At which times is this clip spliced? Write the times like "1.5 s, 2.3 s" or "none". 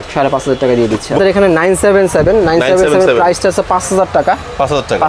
1.2 s